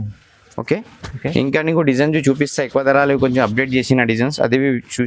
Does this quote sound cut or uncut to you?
uncut